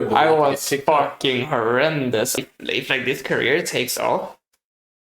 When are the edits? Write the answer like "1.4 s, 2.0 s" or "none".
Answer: 2.4 s